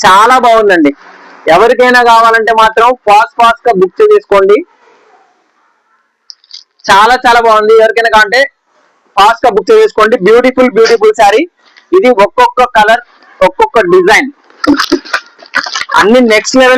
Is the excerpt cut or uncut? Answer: uncut